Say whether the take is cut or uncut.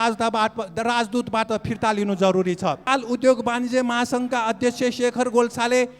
cut